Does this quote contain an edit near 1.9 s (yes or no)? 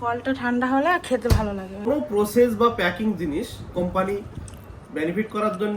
yes